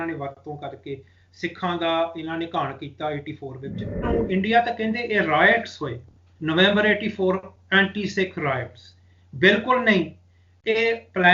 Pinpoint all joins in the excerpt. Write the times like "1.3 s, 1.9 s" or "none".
4.1 s